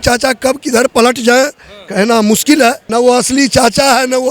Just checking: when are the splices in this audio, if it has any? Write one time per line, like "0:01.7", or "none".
0:02.8